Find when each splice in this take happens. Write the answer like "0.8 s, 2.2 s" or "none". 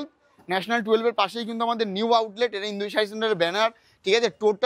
none